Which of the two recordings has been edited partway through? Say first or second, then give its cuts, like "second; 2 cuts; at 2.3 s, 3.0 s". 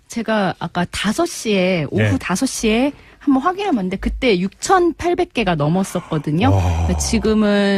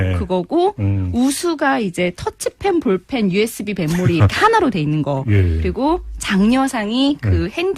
second; 1 cut; at 1.1 s